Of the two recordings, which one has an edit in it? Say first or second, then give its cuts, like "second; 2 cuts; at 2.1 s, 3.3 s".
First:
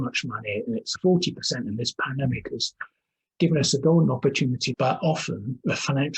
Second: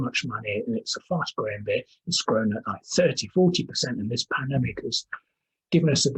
first; 2 cuts; at 0.9 s, 4.7 s